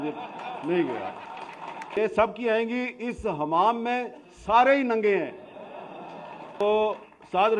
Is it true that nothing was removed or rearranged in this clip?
no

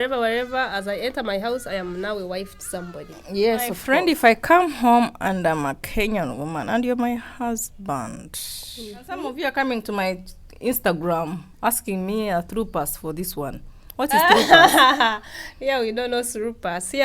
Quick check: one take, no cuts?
no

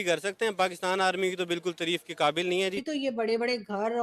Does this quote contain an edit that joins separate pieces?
yes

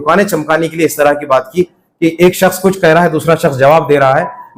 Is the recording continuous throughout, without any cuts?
yes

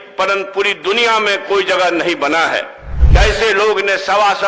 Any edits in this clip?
yes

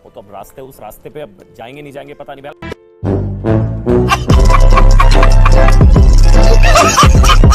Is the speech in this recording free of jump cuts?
yes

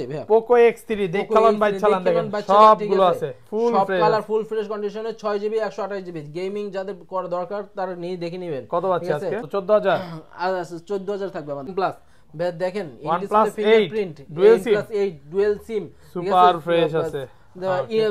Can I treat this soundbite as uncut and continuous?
no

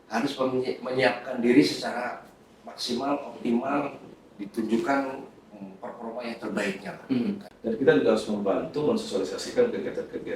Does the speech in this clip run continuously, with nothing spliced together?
no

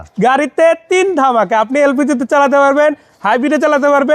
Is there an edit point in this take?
no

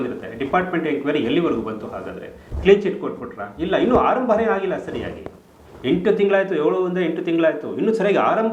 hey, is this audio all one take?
yes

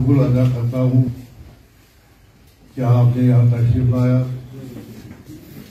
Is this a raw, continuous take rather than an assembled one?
no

